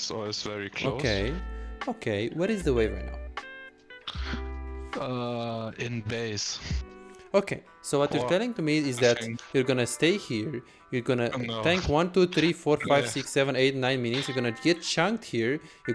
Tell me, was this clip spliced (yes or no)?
no